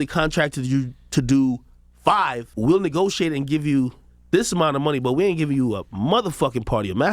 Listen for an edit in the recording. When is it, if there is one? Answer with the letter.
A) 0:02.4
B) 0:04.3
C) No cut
A